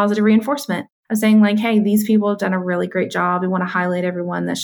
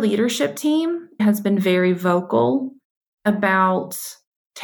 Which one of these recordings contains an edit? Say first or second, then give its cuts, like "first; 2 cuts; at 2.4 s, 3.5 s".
second; 1 cut; at 1.2 s